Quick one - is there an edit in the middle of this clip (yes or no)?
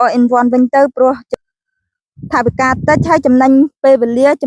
yes